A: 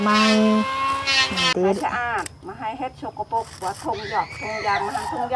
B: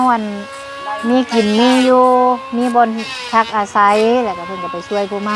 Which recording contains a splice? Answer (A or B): A